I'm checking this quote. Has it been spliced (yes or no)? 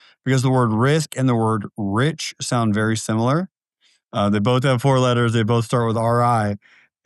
no